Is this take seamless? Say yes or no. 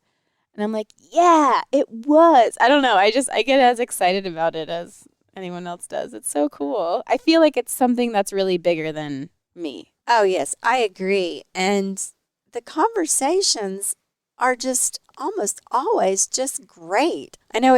yes